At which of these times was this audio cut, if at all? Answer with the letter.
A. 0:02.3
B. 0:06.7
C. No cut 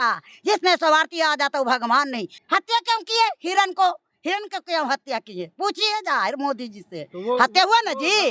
A